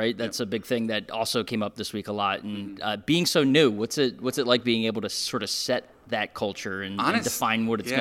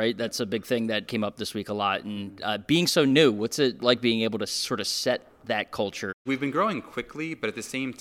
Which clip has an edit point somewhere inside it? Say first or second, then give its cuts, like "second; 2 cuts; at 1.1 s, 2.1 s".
second; 3 cuts; at 1.1 s, 3.8 s, 6.1 s